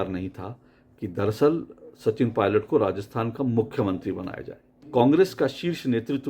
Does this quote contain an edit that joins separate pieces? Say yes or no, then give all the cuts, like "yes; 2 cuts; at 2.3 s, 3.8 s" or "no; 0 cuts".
yes; 1 cut; at 4.7 s